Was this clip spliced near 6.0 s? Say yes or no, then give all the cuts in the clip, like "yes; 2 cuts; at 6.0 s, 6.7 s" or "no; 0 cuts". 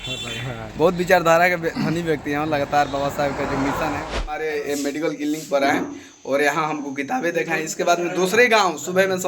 no; 1 cut; at 4.1 s